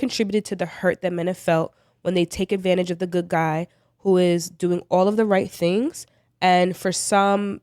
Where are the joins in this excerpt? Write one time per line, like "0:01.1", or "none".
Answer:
none